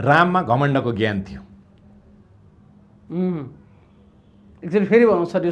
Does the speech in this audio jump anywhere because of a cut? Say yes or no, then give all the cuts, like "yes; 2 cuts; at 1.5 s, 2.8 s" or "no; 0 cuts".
no; 0 cuts